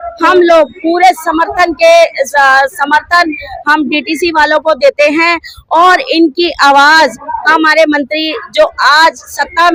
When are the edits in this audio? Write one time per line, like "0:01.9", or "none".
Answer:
none

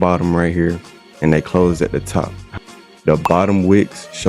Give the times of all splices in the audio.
0:02.4

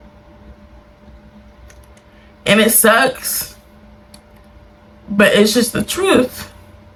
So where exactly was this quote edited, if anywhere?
none

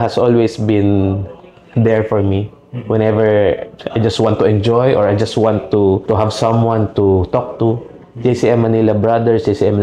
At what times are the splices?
none

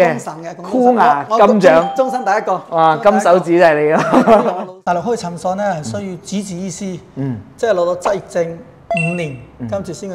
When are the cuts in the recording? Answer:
0:04.7

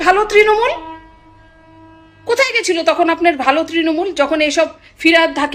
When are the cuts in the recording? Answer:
none

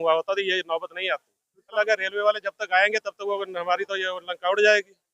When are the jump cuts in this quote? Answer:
0:01.7

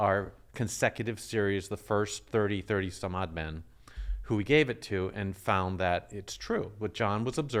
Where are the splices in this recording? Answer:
none

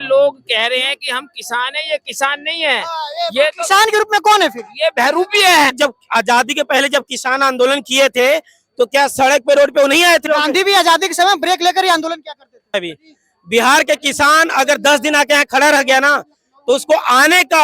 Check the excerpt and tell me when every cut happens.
0:05.8
0:10.3
0:12.7

